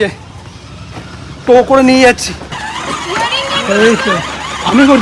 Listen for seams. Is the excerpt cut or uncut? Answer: cut